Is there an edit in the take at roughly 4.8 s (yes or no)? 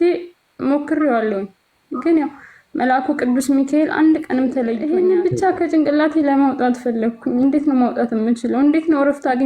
yes